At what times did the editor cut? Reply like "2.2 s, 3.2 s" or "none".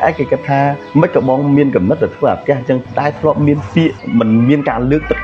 0.8 s, 2.8 s, 4.0 s